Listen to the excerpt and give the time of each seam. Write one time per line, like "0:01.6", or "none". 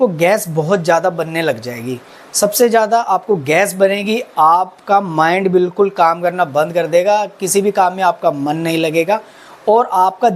none